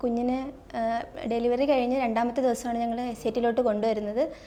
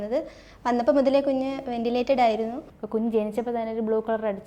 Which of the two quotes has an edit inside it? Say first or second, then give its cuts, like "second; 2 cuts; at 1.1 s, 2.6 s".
second; 1 cut; at 2.7 s